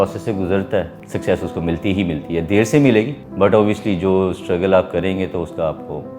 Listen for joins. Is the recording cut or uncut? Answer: cut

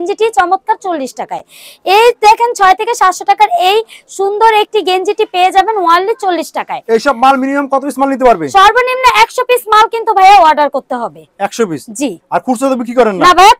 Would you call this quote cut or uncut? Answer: uncut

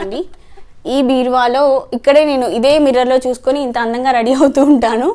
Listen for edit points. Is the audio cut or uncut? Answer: uncut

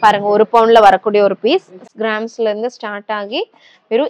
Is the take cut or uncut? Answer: cut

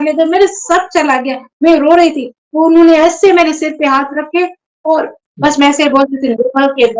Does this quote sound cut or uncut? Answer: cut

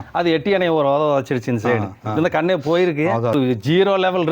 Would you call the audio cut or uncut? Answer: cut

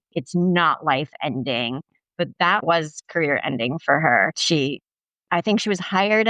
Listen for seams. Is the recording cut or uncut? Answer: cut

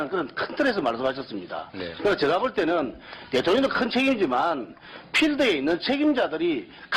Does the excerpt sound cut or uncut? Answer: cut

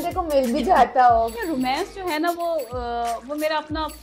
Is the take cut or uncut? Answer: cut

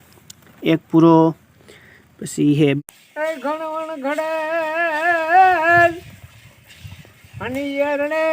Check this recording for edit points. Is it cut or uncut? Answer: cut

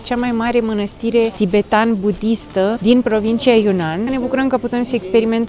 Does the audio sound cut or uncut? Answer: cut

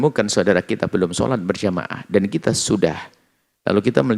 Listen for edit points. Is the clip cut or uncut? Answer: uncut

